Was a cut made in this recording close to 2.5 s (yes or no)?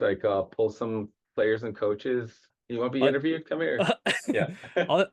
yes